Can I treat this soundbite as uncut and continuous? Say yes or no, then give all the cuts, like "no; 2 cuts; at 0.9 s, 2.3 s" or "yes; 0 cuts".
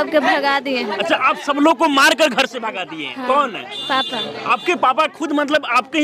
yes; 0 cuts